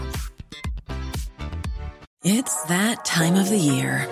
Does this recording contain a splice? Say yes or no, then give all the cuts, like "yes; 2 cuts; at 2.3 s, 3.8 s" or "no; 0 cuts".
yes; 1 cut; at 2.0 s